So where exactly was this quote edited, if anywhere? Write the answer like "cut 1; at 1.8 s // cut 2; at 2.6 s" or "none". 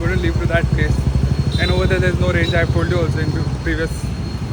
none